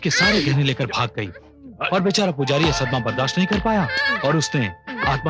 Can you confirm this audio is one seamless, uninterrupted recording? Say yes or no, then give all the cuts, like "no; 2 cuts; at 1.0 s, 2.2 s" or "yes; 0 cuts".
yes; 0 cuts